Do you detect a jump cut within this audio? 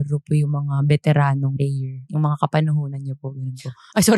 yes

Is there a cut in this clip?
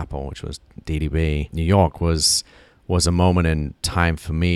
yes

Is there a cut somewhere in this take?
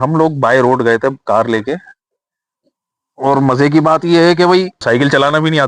yes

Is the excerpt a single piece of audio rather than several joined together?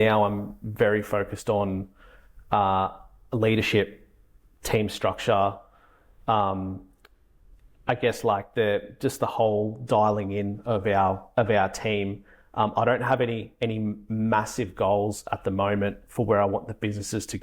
yes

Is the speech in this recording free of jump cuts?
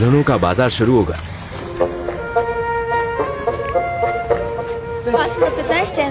yes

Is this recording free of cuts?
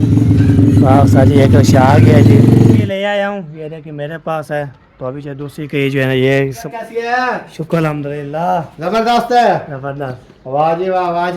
no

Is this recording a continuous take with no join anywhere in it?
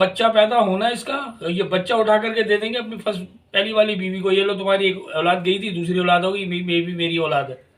yes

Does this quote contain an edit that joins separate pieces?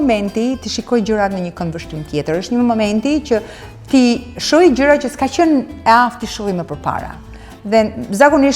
no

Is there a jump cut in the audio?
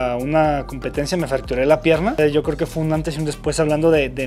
yes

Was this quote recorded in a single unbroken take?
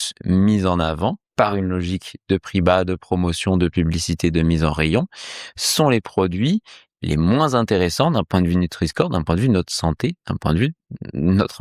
no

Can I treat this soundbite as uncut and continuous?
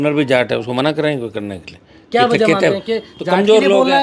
yes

